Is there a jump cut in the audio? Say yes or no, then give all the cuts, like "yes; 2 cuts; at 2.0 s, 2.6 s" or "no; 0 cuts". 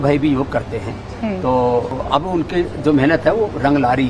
yes; 1 cut; at 2.0 s